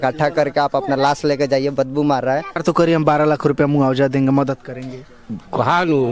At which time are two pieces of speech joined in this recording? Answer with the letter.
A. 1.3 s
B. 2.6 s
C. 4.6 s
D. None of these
B